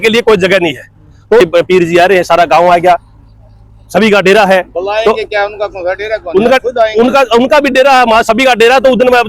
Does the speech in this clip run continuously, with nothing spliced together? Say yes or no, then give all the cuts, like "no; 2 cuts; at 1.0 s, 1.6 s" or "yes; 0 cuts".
no; 1 cut; at 1.4 s